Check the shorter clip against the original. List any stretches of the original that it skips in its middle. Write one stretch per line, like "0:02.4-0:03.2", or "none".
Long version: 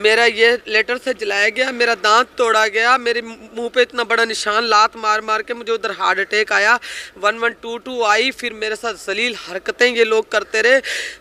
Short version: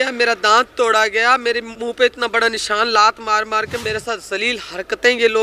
0:03.3-0:03.5
0:05.6-0:08.6